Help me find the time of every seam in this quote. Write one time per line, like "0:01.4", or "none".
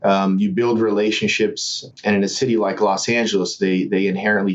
0:01.8